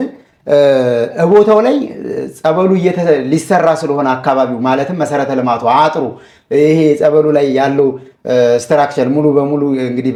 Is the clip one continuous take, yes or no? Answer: yes